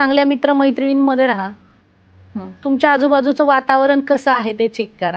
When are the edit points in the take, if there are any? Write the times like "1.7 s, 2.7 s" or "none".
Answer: none

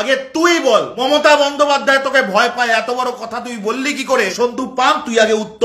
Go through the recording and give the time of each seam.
0.9 s, 4.3 s

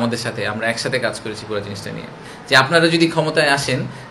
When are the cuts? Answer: 2.3 s

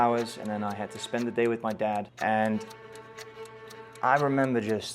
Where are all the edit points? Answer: 2.1 s

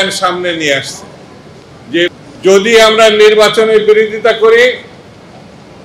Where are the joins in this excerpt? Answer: 2.1 s

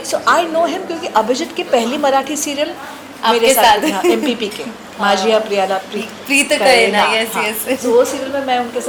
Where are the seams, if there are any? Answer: none

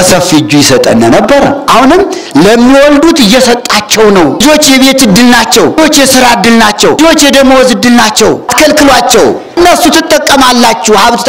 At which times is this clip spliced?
1.6 s, 4.4 s, 5.8 s, 7.0 s, 8.5 s, 9.6 s

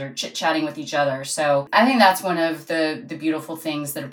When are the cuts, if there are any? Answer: 1.7 s

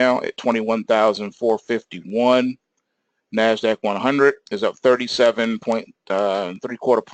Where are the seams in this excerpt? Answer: 1.6 s

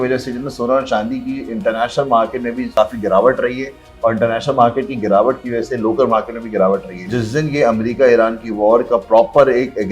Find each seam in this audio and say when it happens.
2.7 s, 7.1 s

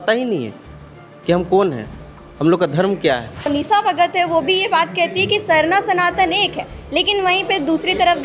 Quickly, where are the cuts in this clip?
3.5 s

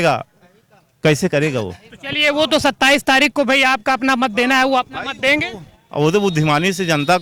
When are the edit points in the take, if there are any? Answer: none

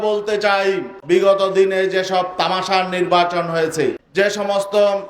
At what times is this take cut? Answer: 0.9 s, 4.0 s

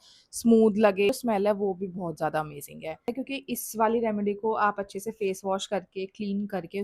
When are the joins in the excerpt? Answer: 1.1 s, 3.1 s

